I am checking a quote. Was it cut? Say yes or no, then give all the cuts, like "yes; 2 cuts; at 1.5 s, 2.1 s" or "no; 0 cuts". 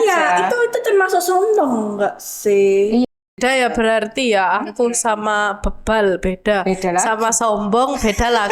yes; 1 cut; at 3.1 s